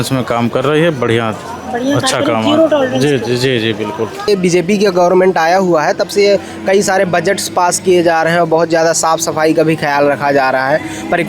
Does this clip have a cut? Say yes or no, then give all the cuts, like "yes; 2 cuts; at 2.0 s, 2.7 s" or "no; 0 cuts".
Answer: yes; 1 cut; at 4.3 s